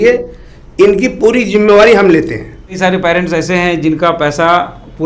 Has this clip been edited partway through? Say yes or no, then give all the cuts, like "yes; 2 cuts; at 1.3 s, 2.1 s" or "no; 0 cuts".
yes; 1 cut; at 2.8 s